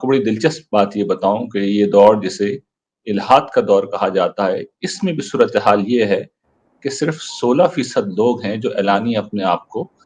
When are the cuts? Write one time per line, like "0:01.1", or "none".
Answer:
none